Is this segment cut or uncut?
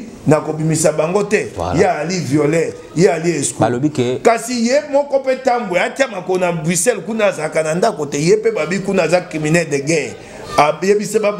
uncut